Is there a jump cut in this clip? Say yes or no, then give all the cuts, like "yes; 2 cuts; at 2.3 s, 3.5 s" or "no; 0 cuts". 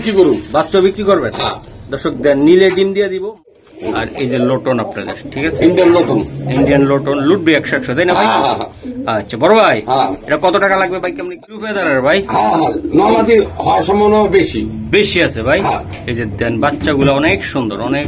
yes; 2 cuts; at 3.2 s, 11.3 s